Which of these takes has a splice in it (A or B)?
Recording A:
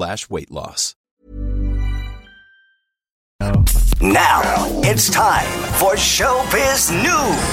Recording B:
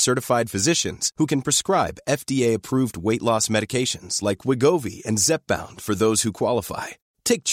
A